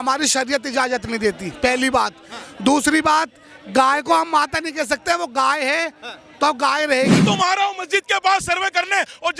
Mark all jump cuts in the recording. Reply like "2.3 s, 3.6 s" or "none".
7.2 s